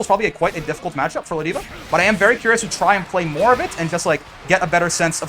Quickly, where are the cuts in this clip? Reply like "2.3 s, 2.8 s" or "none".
none

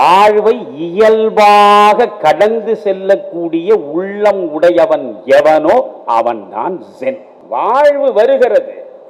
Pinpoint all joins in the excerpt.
7.3 s

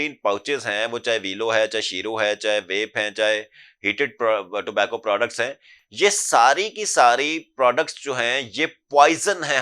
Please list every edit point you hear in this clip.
none

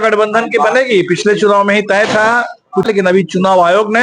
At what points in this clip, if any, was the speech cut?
2.9 s

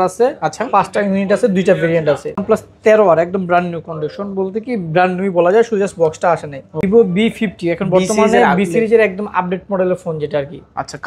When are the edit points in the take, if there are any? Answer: 2.4 s, 6.8 s

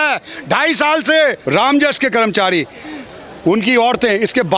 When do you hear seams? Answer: 1.4 s

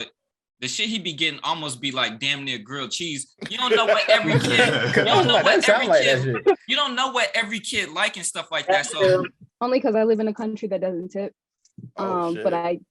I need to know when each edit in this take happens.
9.4 s

